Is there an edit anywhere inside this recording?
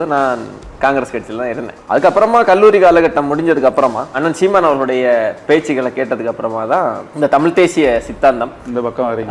yes; 3 cuts; at 1.7 s, 4.2 s, 7.0 s

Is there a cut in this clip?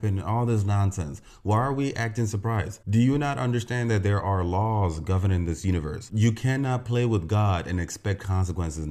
yes; 1 cut; at 6.1 s

